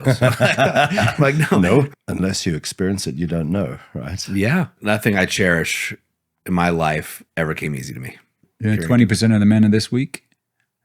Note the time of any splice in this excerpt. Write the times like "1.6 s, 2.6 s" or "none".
1.9 s, 4.8 s, 8.5 s